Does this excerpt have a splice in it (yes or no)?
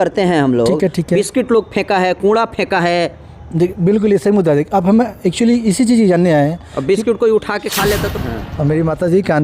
yes